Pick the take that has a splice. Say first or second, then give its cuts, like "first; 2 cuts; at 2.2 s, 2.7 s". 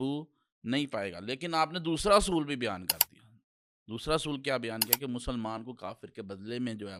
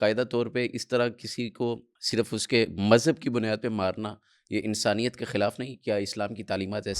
second; 1 cut; at 1.9 s